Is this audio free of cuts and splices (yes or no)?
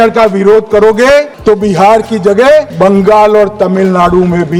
no